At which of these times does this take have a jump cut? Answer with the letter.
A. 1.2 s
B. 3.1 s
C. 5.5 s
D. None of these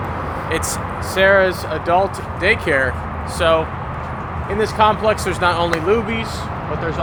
D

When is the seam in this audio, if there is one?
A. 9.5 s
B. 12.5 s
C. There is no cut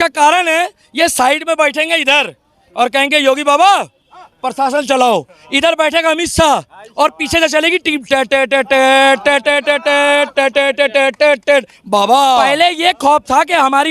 B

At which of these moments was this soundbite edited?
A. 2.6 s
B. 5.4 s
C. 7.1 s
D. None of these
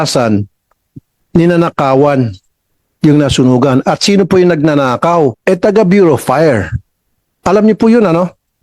B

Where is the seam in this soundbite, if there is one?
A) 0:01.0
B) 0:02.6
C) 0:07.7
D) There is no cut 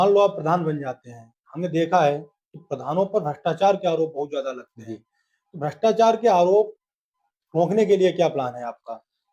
D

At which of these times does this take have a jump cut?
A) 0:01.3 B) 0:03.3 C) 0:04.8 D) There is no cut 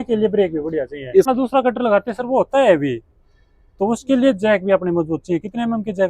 A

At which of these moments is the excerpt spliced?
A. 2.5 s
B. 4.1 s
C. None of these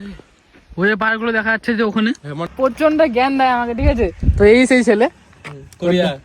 A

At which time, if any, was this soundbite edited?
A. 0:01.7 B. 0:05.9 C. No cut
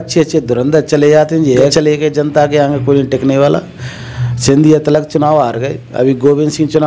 A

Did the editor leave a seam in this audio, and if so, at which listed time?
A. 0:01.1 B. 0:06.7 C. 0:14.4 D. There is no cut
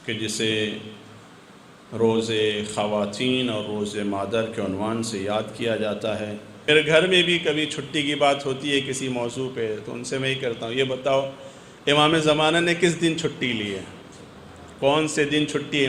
B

